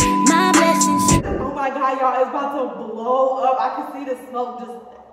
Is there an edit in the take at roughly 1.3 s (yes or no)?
yes